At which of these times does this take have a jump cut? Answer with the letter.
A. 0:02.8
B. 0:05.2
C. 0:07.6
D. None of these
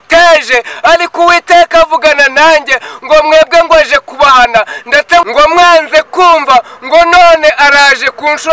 B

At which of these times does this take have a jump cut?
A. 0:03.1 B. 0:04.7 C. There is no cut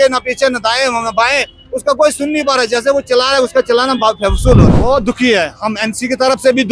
B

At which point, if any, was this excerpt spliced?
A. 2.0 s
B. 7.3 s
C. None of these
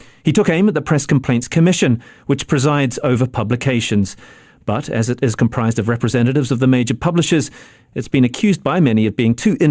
B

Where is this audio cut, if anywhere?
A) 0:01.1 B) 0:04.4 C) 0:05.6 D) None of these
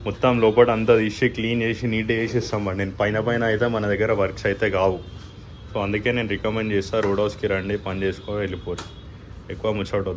D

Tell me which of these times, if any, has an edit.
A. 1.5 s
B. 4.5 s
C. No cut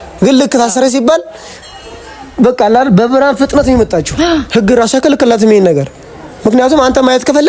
B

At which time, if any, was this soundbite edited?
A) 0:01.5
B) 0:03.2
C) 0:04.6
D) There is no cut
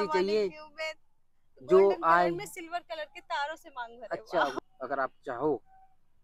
C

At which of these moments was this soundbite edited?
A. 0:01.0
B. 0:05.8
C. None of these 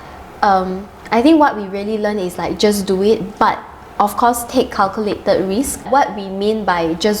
B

